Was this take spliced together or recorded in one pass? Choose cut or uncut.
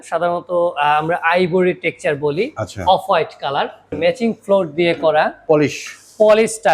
cut